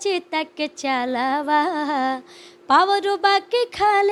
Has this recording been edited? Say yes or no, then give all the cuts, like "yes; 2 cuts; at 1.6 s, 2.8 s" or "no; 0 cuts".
no; 0 cuts